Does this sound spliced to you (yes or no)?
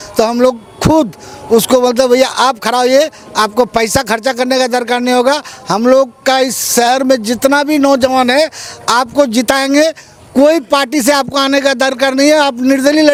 no